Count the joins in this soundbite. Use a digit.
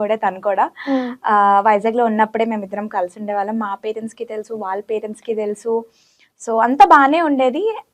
0